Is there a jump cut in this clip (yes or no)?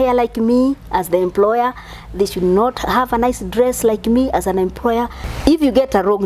yes